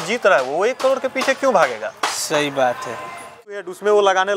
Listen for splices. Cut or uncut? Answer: cut